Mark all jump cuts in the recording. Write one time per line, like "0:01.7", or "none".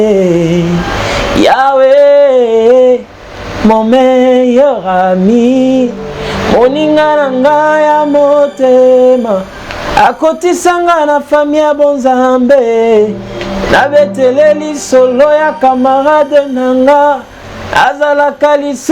none